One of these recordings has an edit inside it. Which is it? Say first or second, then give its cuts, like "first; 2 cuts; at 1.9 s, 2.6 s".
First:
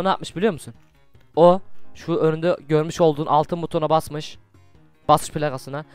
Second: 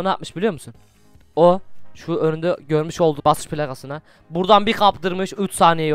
second; 1 cut; at 3.2 s